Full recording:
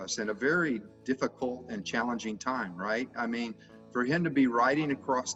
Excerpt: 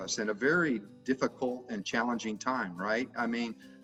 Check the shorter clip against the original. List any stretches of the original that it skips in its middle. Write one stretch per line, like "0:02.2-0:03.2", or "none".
none